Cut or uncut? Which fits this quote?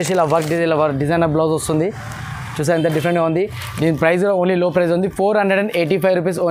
uncut